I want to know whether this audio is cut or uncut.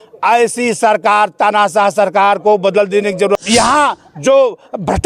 cut